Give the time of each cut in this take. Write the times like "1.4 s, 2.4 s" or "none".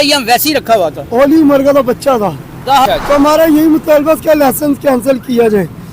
2.8 s